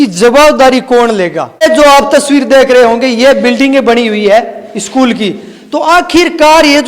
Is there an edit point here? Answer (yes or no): yes